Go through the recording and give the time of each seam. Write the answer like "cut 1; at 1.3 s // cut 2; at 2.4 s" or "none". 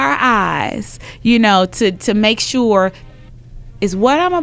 cut 1; at 3.1 s

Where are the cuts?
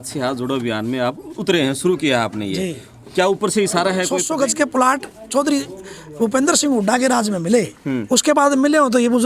cut 1; at 4.2 s

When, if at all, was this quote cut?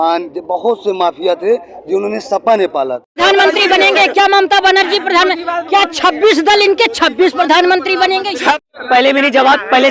cut 1; at 3.2 s // cut 2; at 8.7 s

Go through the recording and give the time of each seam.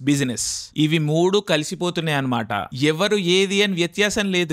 none

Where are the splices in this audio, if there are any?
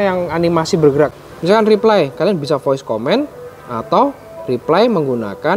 cut 1; at 1.1 s

